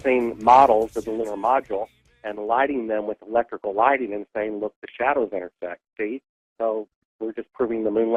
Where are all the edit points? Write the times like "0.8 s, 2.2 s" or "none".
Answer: none